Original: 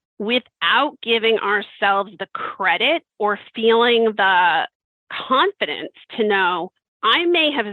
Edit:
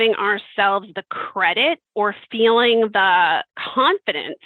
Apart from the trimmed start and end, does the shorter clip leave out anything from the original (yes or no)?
yes